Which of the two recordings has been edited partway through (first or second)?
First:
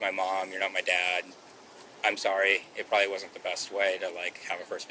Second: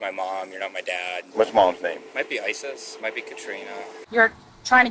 second